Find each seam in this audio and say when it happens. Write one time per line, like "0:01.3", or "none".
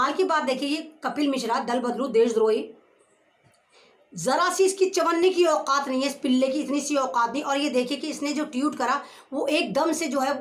none